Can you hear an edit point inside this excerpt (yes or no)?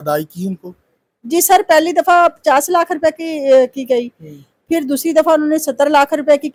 no